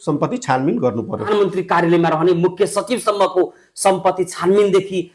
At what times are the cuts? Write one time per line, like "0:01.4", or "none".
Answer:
0:01.3